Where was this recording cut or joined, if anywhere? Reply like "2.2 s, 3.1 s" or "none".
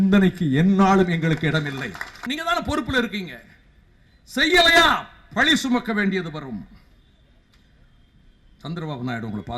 2.2 s